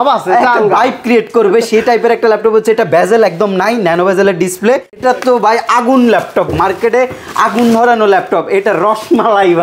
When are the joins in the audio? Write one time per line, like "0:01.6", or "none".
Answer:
0:05.0